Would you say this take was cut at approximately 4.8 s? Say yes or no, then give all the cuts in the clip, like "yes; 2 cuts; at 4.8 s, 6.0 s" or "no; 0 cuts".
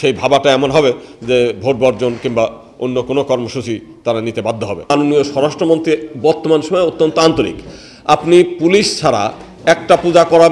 yes; 1 cut; at 4.8 s